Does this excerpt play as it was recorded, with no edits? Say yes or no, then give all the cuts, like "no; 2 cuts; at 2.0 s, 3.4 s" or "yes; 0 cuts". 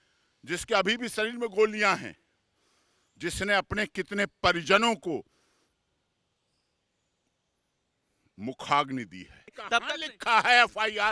no; 1 cut; at 9.5 s